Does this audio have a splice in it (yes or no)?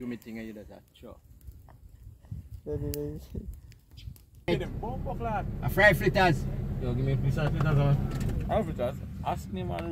yes